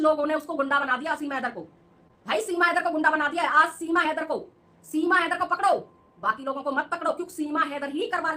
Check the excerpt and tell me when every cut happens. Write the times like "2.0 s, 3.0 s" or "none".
none